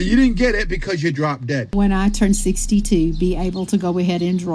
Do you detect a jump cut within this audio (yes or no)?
yes